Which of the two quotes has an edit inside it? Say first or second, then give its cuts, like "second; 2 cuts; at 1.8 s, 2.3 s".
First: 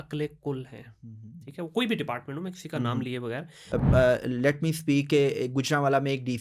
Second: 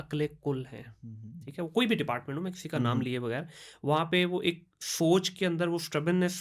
first; 1 cut; at 3.5 s